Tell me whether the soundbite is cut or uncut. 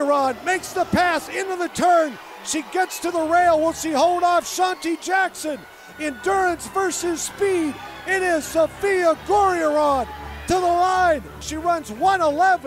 uncut